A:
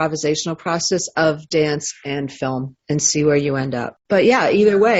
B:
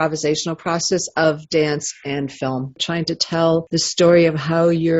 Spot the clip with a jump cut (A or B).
B